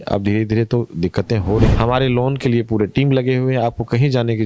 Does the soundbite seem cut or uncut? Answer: cut